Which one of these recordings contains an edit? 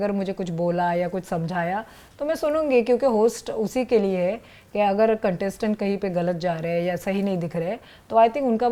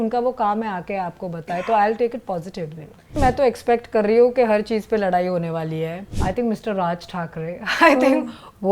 second; 2 cuts; at 3.2 s, 6.1 s

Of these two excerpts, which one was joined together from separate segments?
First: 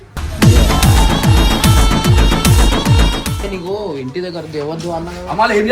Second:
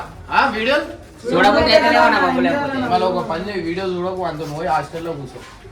first; 1 cut; at 3.5 s

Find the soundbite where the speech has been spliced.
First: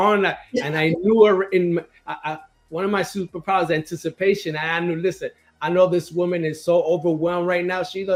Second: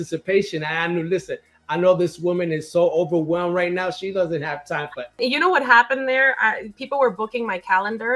second; 1 cut; at 5.2 s

